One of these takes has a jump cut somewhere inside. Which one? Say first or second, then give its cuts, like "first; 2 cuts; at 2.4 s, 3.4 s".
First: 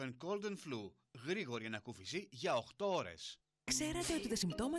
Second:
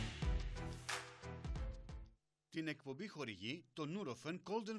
second; 2 cuts; at 1.1 s, 1.8 s